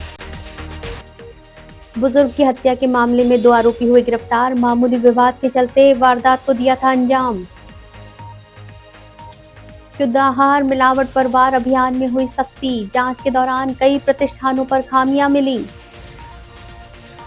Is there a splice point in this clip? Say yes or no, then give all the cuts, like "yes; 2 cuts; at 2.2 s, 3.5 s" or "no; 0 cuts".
yes; 1 cut; at 0.9 s